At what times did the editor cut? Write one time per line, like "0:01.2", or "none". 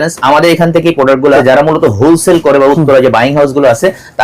0:01.4